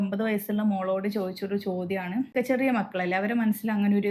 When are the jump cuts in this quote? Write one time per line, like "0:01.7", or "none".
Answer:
0:02.3

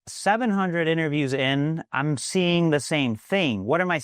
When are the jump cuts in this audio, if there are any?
none

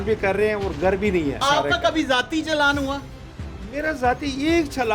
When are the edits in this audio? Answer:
0:01.4

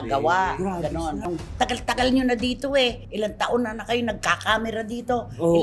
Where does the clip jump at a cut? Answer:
0:01.2

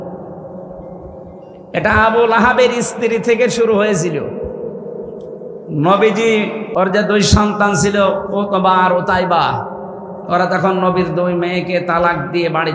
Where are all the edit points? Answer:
0:06.6

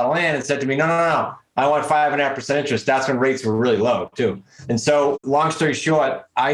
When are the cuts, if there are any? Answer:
0:04.5

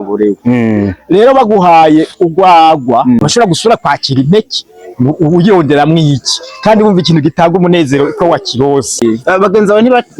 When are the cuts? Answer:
0:03.2
0:09.0

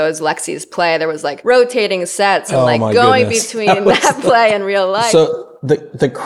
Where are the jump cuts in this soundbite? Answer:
0:01.4
0:02.5
0:05.1

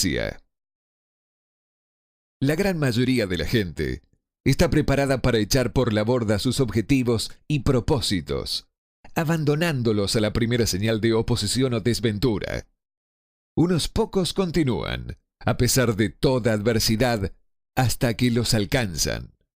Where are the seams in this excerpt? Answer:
0:18.4

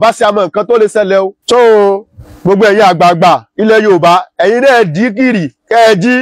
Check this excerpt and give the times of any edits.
none

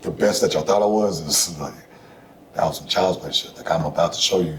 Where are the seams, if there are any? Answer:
none

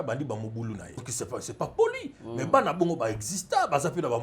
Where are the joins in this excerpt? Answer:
0:01.0

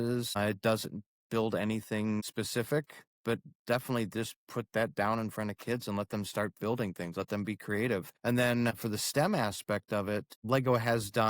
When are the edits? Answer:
0:10.3

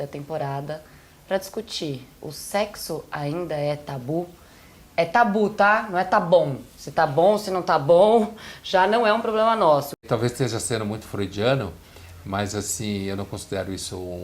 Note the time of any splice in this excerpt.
0:09.9

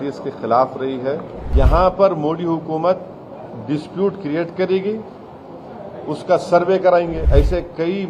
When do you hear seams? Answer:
0:01.4
0:07.2

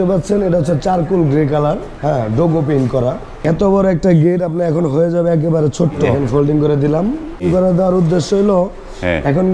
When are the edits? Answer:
0:01.9
0:03.4
0:06.1
0:07.4

